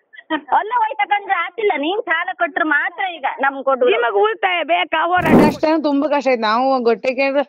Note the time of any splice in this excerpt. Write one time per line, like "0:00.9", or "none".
0:05.4